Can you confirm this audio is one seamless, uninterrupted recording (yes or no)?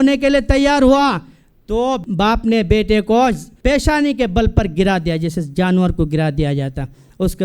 no